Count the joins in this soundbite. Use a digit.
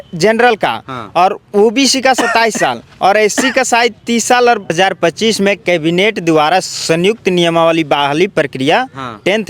1